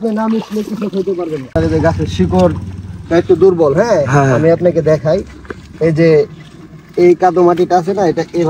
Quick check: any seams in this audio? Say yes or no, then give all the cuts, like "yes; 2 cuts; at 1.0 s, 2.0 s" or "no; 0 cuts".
yes; 1 cut; at 1.5 s